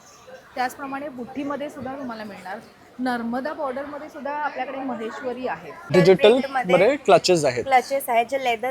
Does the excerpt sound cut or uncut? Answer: cut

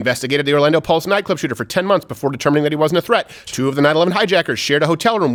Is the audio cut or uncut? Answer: uncut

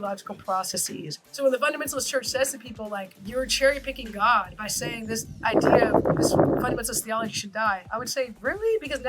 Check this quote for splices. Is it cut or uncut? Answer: cut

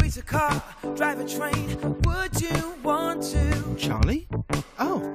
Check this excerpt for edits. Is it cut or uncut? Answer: uncut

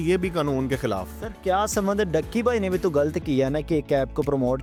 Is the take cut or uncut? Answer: uncut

